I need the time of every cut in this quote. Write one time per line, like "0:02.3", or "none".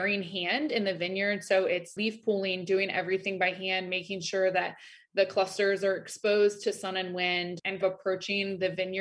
0:01.9
0:07.8